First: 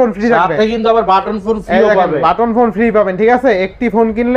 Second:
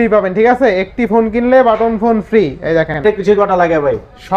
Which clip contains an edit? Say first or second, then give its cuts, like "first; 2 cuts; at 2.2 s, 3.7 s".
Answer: second; 1 cut; at 3.0 s